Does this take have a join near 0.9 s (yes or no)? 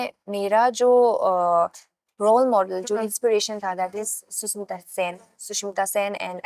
no